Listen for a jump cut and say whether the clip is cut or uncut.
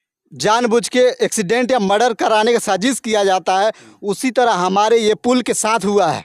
cut